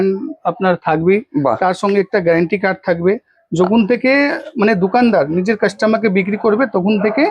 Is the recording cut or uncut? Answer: uncut